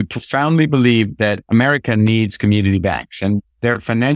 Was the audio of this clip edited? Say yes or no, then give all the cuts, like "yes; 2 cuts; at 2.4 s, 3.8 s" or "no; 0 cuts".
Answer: yes; 1 cut; at 1.4 s